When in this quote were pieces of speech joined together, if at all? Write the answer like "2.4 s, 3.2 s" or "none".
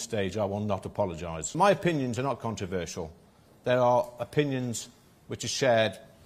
1.6 s